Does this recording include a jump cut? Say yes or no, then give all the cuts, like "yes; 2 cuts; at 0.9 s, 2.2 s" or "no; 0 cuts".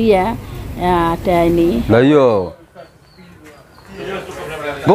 yes; 1 cut; at 1.8 s